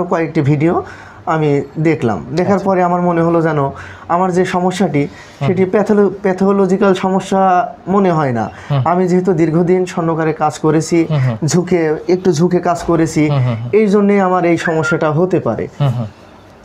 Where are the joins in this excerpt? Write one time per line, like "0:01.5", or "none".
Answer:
none